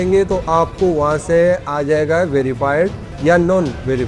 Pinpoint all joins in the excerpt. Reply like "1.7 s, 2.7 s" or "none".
3.1 s